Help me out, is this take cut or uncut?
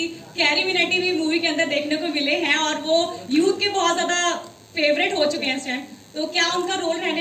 uncut